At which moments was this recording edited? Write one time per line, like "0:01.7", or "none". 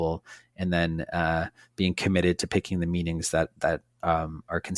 none

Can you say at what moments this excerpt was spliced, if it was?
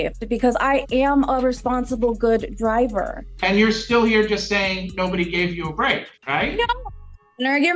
0:03.2
0:06.1

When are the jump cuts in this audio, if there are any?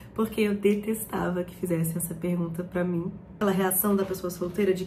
0:03.4

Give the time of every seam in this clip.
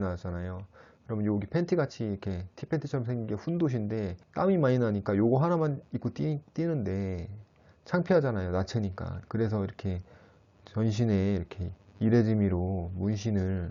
none

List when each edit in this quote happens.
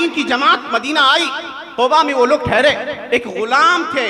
0:03.0

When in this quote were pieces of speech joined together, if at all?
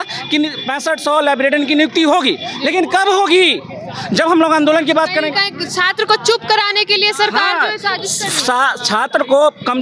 none

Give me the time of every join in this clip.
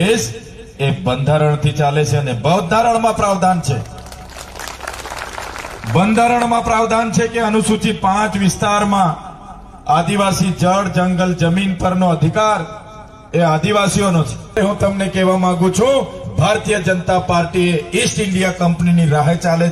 0:14.5

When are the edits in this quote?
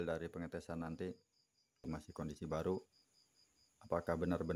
0:01.9

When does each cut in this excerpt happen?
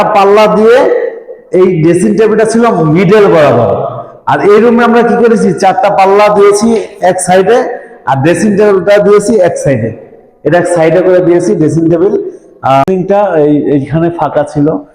0:12.9

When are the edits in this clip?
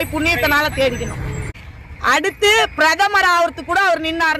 0:01.5

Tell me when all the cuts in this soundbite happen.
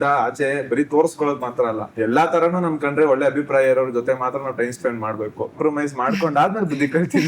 0:01.9
0:05.6

